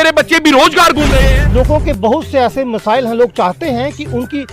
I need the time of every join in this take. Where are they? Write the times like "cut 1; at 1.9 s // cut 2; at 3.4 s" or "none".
cut 1; at 1.2 s